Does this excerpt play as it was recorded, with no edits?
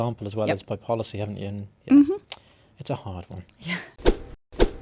yes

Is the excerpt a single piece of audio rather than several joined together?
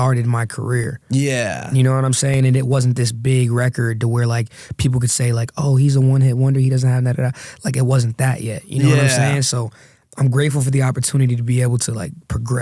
yes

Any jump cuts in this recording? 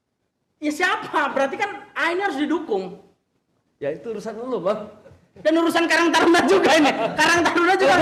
no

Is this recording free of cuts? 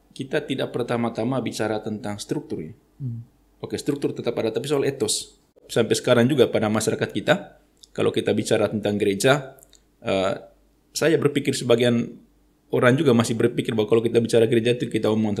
no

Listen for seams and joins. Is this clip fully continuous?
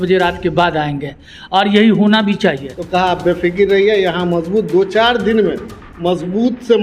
no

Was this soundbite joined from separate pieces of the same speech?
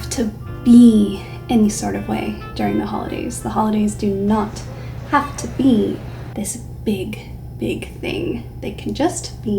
no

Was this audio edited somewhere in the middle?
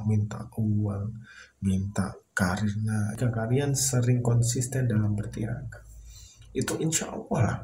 yes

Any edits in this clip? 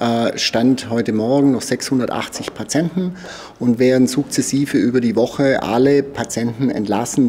no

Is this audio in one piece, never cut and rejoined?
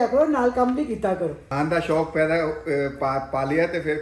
no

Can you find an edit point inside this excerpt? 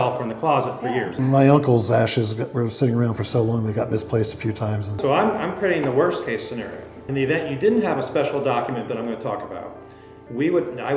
yes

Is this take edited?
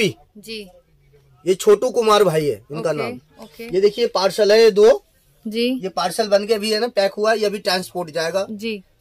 no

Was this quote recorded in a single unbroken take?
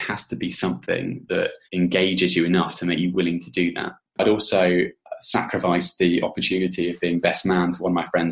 no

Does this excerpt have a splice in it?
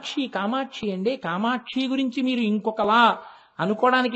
no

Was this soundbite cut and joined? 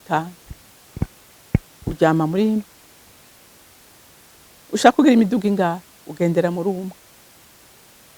no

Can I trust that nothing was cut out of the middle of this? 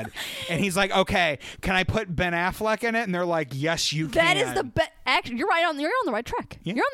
yes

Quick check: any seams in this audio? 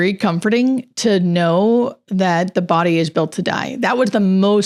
no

